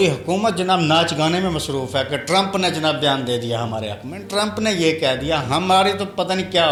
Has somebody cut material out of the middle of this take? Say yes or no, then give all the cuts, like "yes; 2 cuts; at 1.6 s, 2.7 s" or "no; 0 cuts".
no; 0 cuts